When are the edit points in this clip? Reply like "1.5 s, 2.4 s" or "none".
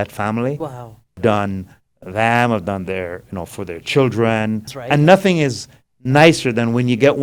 1.2 s, 4.7 s